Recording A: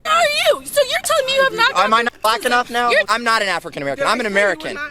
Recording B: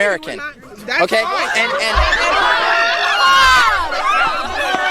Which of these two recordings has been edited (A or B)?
A